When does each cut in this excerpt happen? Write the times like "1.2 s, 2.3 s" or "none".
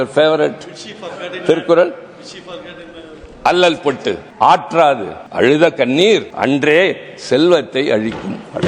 4.3 s, 5.2 s, 6.3 s

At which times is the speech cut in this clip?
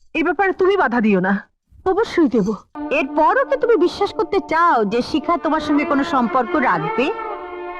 2.8 s

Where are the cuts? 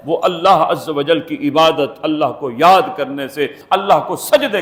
none

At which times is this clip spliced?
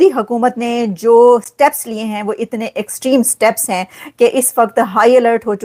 none

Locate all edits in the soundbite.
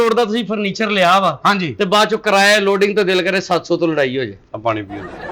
none

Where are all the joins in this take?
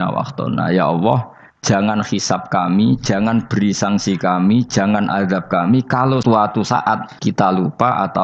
6.2 s, 7.1 s

